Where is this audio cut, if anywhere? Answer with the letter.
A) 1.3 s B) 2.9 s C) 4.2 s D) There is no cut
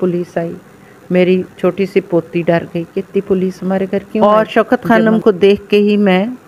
C